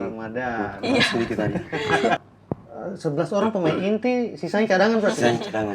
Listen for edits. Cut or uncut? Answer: cut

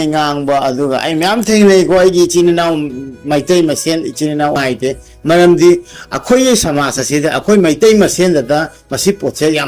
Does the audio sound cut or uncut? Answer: cut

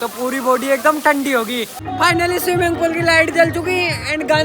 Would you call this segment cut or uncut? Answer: cut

